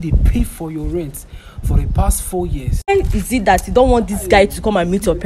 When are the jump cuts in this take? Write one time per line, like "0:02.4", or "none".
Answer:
0:02.9